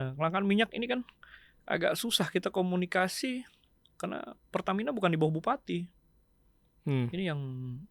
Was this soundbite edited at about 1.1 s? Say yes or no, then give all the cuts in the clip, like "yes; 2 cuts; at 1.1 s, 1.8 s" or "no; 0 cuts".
no; 0 cuts